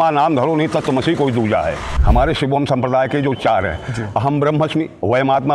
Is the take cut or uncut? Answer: cut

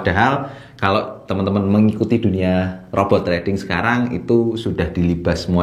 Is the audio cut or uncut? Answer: uncut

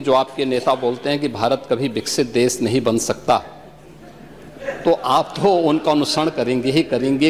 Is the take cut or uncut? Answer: uncut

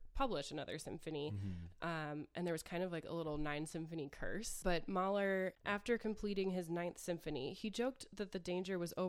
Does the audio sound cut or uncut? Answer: cut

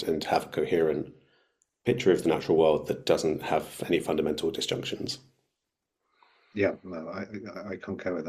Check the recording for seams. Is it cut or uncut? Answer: uncut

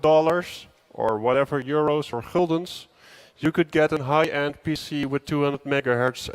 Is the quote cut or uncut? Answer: cut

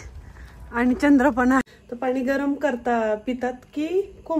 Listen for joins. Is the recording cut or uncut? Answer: cut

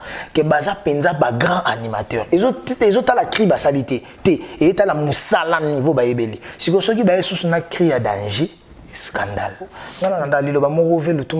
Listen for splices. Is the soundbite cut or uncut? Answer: cut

